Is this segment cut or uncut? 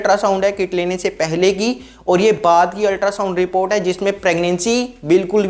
uncut